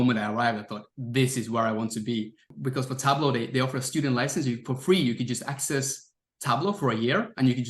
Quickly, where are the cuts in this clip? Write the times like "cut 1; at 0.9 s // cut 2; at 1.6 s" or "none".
cut 1; at 2.4 s